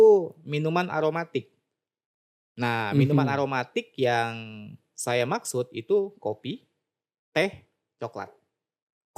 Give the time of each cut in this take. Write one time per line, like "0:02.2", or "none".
none